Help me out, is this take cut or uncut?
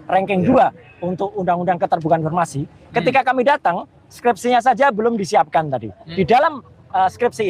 cut